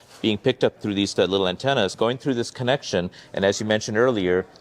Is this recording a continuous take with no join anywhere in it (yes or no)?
no